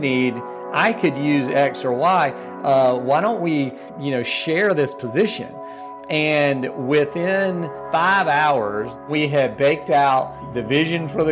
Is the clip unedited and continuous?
no; 4 cuts; at 3.9 s, 7.7 s, 9.0 s, 10.5 s

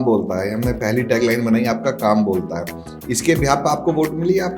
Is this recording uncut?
yes; 0 cuts

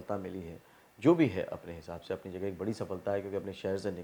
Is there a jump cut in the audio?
no; 0 cuts

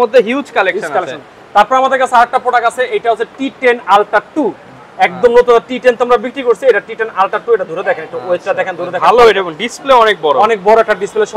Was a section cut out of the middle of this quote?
no; 0 cuts

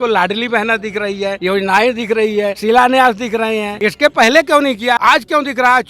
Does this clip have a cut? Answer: yes; 4 cuts; at 1.4 s, 2.6 s, 3.7 s, 5.0 s

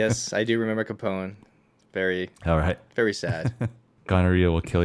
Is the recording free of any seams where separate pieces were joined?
no; 1 cut; at 3.9 s

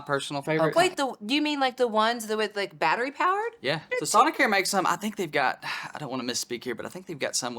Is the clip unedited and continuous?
no; 1 cut; at 3.8 s

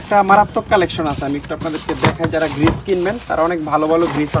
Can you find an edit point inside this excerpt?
no; 0 cuts

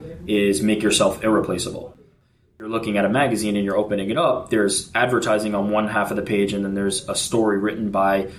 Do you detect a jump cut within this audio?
yes; 1 cut; at 2.0 s

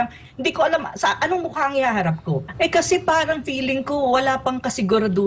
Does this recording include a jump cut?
yes; 1 cut; at 2.5 s

